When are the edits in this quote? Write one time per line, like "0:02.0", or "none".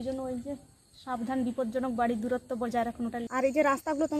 0:03.2